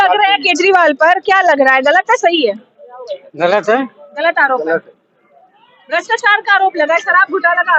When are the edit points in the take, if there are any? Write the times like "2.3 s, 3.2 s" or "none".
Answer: none